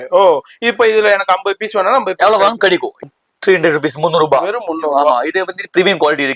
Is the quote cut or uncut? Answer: cut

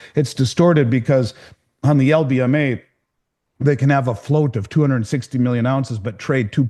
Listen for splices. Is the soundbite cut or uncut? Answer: uncut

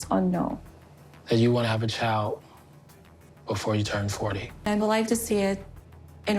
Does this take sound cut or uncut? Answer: cut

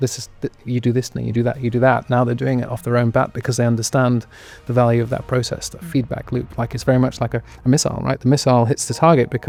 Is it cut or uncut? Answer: uncut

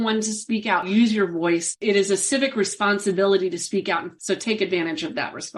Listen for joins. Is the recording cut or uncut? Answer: cut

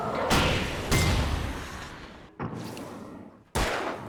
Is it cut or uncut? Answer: uncut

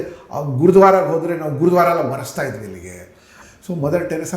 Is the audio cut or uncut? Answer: cut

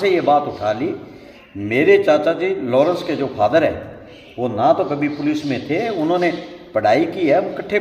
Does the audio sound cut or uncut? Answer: uncut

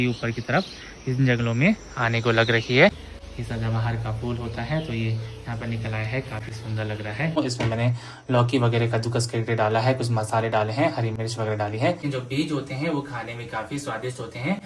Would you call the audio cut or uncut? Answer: cut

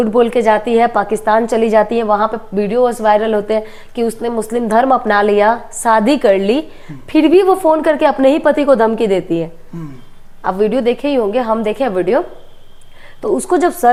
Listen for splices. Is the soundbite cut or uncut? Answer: uncut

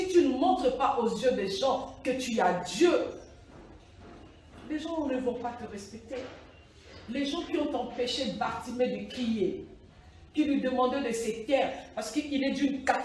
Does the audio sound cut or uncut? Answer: uncut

